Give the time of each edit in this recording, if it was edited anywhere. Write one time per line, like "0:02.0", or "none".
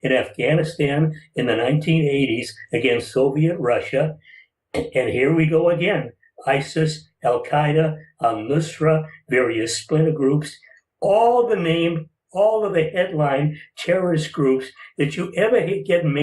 0:09.6